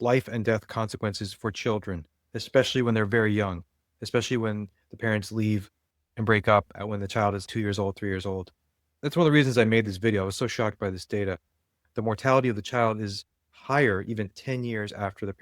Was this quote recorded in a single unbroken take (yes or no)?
no